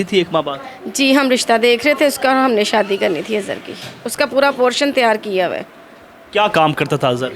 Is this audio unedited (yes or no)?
yes